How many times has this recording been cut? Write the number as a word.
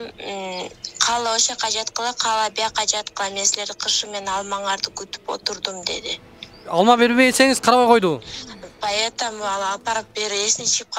one